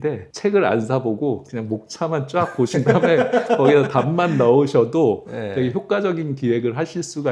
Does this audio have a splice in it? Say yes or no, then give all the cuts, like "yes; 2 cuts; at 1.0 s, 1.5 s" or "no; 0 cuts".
no; 0 cuts